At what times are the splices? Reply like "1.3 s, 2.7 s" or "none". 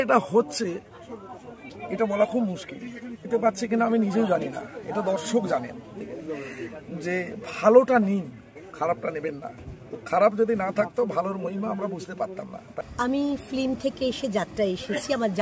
3.2 s, 6.0 s, 12.7 s